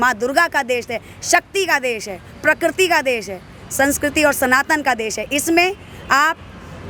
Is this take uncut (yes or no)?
yes